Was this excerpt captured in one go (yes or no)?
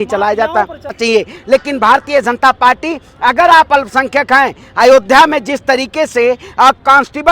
no